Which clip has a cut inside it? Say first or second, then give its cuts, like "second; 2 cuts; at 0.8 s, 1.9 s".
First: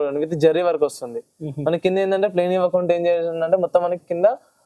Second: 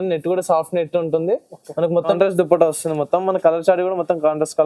second; 1 cut; at 2.2 s